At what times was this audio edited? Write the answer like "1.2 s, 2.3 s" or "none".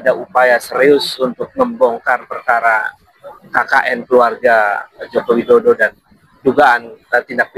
none